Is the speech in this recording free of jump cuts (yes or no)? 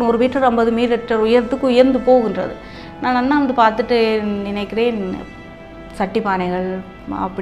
yes